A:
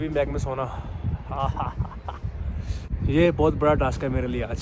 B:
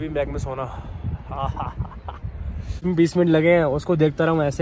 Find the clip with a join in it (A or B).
B